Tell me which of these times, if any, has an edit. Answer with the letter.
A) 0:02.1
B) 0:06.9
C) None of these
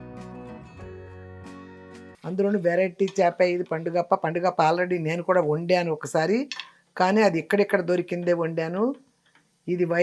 A